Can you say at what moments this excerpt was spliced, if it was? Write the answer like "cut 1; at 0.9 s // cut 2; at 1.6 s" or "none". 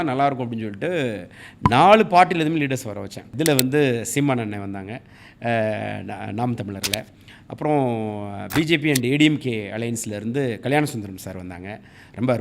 cut 1; at 3.2 s

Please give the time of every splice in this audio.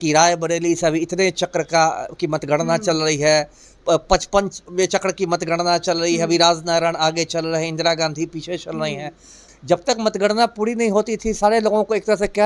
cut 1; at 9.4 s

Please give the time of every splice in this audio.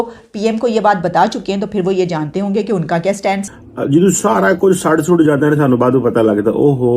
cut 1; at 3.5 s

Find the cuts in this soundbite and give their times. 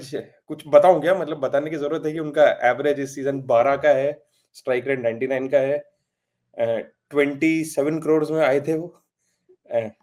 none

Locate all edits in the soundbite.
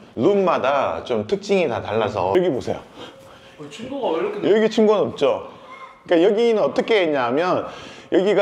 cut 1; at 2.3 s

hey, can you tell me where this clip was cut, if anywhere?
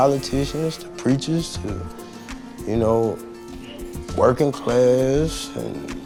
none

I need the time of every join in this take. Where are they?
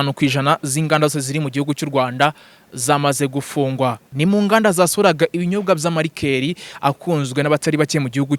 cut 1; at 4.1 s

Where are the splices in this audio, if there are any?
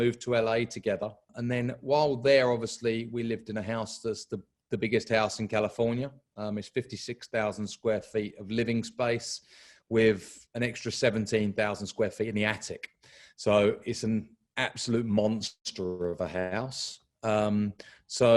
cut 1; at 1.3 s

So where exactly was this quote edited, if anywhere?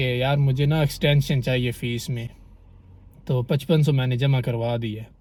none

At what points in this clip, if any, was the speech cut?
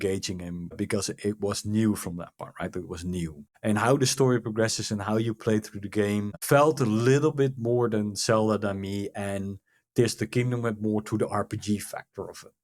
cut 1; at 3.5 s // cut 2; at 6.4 s

